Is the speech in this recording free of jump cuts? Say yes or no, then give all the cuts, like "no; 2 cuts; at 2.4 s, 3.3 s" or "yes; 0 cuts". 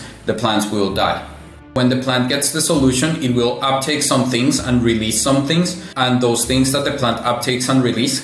no; 2 cuts; at 1.8 s, 5.8 s